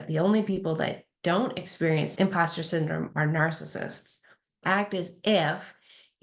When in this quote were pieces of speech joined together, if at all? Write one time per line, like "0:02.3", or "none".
0:02.1
0:04.6